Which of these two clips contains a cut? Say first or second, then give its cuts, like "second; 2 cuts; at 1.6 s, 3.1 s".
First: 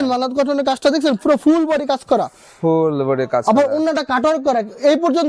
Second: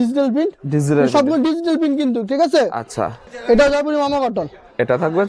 second; 1 cut; at 3.2 s